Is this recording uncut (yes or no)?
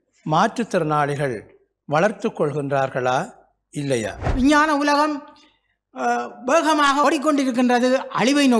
no